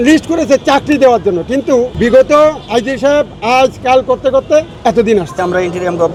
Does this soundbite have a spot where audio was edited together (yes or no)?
no